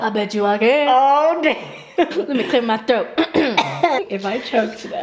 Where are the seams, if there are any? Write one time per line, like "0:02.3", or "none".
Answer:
0:02.1
0:04.0